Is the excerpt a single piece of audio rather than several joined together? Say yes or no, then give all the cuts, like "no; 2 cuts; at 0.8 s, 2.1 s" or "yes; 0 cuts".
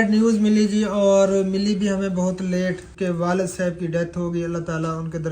no; 1 cut; at 2.9 s